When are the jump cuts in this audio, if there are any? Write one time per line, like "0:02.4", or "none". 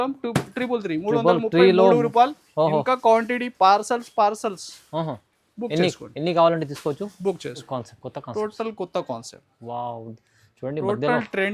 0:07.6